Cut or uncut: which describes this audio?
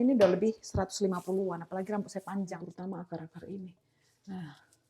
cut